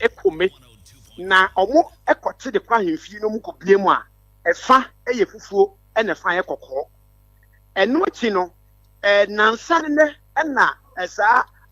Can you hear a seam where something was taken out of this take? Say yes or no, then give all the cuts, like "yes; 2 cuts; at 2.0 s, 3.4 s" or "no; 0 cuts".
no; 0 cuts